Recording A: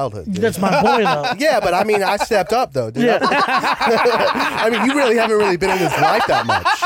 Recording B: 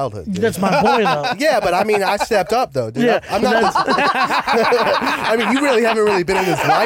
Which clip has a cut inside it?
A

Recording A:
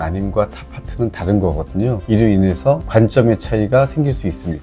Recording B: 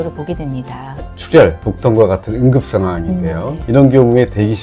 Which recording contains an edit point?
B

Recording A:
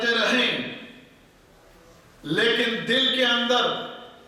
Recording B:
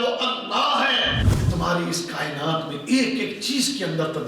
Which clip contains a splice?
B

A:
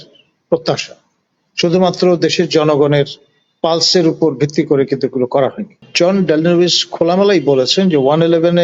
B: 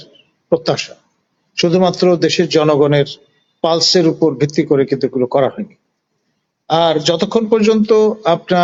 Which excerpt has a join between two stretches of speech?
A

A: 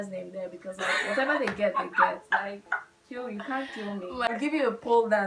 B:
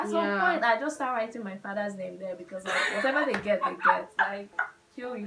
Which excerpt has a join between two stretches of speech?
A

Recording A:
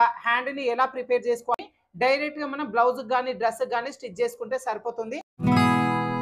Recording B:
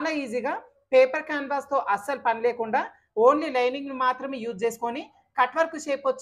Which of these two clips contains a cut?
A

